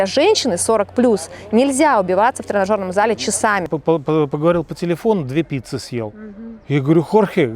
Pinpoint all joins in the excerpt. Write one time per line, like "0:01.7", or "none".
0:03.7